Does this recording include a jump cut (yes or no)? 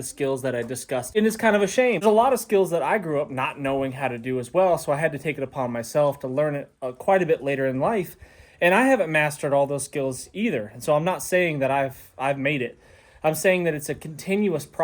yes